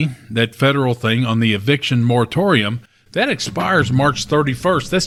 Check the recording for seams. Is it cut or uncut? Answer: uncut